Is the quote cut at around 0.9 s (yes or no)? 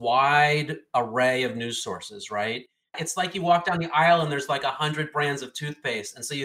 no